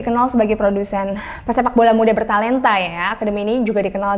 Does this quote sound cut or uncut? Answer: uncut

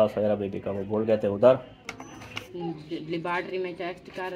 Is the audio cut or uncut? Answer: cut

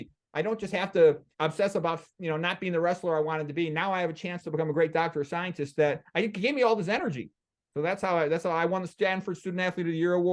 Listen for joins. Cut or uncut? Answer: uncut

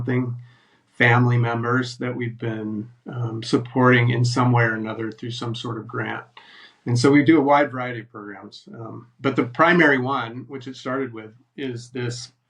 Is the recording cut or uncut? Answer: uncut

